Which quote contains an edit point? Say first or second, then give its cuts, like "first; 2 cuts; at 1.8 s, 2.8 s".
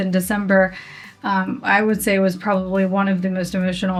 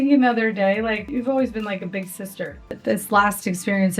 second; 2 cuts; at 1.1 s, 2.8 s